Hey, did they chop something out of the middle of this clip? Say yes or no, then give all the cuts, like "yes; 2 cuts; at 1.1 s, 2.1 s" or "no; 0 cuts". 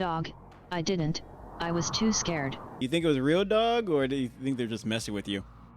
yes; 1 cut; at 2.6 s